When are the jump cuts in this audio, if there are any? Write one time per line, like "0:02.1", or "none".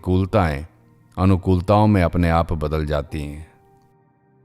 0:03.5